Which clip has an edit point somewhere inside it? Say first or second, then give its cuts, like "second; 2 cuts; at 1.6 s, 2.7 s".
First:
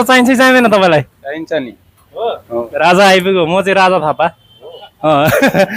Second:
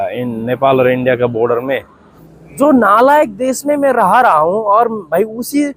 second; 1 cut; at 2.2 s